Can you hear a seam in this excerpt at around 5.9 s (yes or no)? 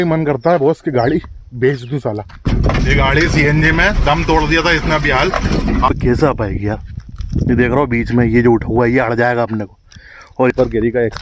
yes